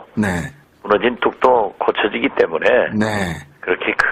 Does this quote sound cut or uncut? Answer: cut